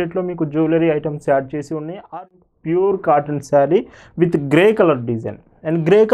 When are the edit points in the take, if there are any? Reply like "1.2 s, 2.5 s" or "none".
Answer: 2.1 s